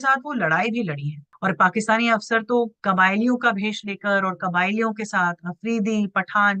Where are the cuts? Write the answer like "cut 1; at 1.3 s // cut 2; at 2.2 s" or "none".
cut 1; at 1.3 s // cut 2; at 2.8 s